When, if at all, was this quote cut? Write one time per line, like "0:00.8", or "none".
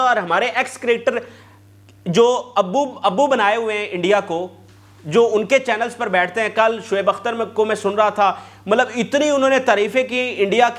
none